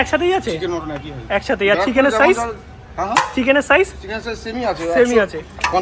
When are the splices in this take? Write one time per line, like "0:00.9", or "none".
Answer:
none